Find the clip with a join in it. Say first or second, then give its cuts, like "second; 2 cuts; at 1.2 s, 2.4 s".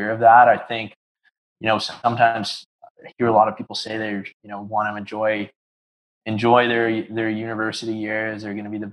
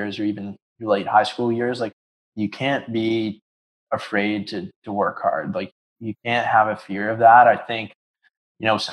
second; 2 cuts; at 1.9 s, 5.7 s